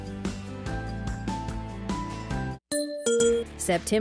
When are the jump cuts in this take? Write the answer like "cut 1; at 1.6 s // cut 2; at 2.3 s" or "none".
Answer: cut 1; at 2.6 s